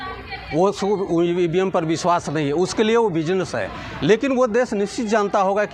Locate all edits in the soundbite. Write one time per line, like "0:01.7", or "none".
none